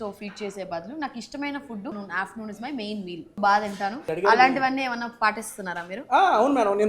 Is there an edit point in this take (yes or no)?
yes